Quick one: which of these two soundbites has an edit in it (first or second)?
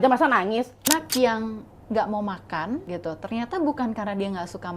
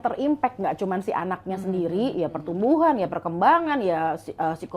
first